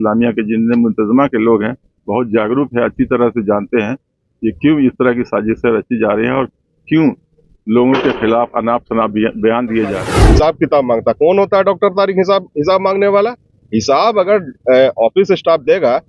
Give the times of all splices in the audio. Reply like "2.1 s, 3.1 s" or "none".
10.1 s